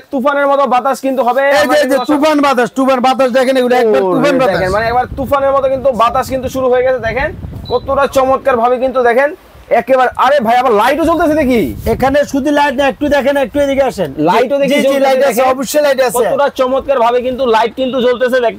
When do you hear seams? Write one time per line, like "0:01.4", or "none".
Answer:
none